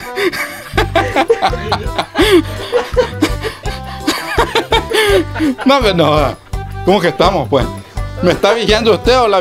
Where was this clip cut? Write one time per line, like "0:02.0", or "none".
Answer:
none